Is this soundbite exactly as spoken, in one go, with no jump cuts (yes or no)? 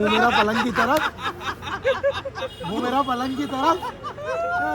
yes